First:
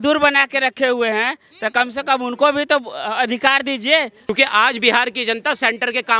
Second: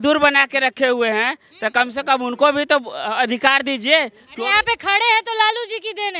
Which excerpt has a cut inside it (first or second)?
first